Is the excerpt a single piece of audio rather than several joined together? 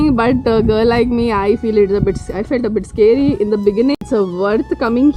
no; 1 cut; at 3.9 s

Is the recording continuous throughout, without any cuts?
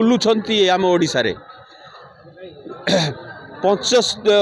yes; 0 cuts

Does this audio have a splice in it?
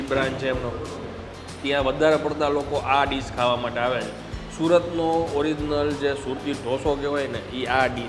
no; 0 cuts

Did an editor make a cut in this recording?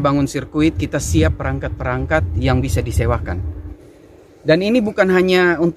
yes; 1 cut; at 3.8 s

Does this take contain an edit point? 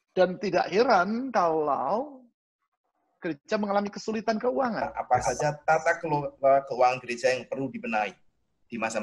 yes; 1 cut; at 4.9 s

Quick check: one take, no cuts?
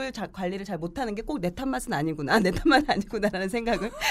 yes; 0 cuts

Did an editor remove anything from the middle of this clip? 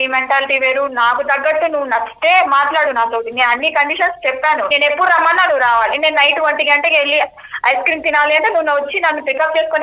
yes; 1 cut; at 4.7 s

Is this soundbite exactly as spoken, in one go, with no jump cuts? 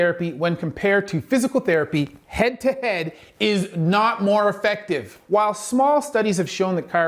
no; 1 cut; at 5.1 s

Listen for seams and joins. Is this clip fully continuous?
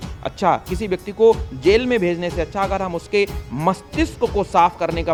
yes; 0 cuts

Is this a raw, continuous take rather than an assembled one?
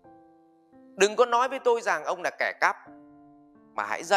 no; 1 cut; at 0.9 s

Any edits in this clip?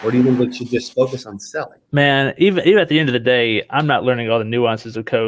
yes; 1 cut; at 1.8 s

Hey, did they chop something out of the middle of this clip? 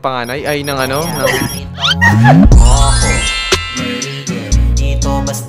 no; 0 cuts

